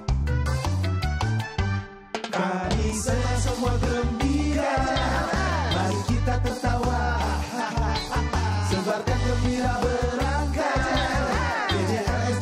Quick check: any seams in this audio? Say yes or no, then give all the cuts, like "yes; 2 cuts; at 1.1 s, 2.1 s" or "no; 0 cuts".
no; 0 cuts